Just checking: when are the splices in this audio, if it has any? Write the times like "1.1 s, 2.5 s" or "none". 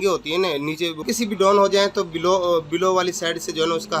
1.0 s